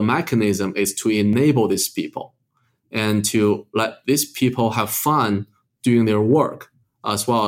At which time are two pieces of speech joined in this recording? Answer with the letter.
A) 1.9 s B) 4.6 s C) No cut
C